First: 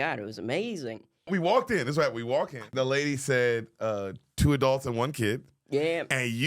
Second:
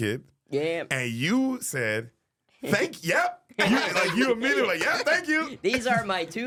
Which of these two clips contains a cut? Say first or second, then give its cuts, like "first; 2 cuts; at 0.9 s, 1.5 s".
first; 2 cuts; at 1.3 s, 2.7 s